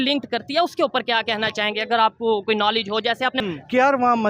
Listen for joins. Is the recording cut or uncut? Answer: cut